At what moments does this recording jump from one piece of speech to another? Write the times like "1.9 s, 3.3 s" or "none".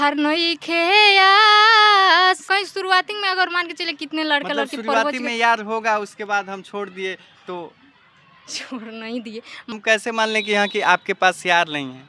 2.4 s, 9.7 s